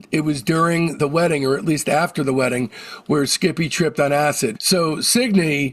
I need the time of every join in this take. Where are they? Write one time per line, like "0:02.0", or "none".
0:04.6